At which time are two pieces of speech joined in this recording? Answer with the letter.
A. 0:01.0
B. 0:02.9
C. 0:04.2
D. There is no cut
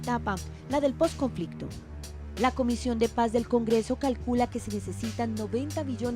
A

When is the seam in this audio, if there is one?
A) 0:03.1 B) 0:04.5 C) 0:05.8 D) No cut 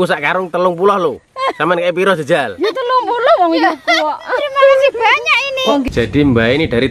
C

